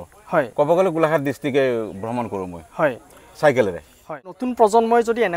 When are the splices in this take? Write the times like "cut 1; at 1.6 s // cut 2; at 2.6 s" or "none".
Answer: cut 1; at 4.4 s